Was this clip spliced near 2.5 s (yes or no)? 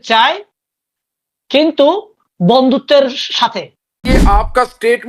no